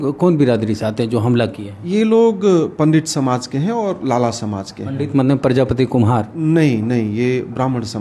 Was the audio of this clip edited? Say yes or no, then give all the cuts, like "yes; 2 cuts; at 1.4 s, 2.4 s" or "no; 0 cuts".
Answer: no; 0 cuts